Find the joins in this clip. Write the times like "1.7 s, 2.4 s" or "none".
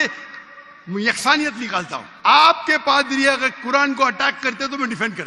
2.0 s